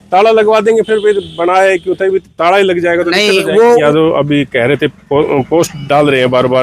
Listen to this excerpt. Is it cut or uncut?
cut